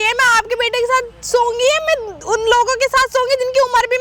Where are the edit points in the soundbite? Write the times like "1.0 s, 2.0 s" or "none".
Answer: none